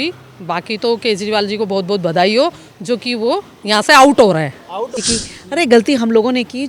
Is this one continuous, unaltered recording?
no; 1 cut; at 5.0 s

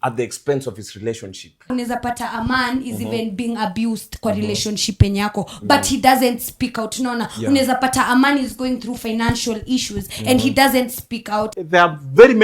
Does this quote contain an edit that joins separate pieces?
yes; 2 cuts; at 1.7 s, 11.5 s

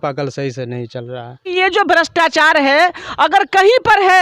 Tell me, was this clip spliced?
yes; 1 cut; at 1.5 s

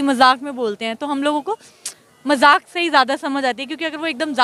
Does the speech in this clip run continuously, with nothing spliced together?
yes; 0 cuts

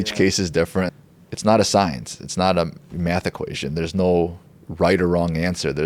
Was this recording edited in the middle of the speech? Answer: yes; 1 cut; at 1.0 s

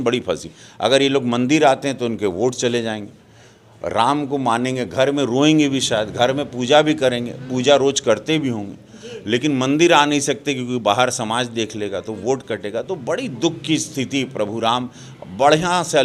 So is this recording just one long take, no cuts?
yes; 0 cuts

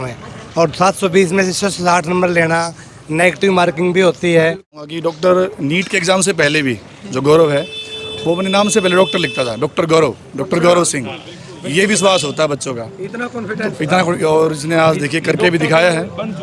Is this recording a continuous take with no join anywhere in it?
no; 1 cut; at 4.9 s

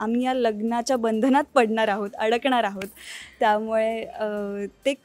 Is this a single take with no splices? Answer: yes; 0 cuts

